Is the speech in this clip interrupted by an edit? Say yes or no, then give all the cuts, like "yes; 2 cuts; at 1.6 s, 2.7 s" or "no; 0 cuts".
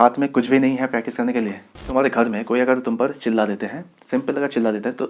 yes; 1 cut; at 1.8 s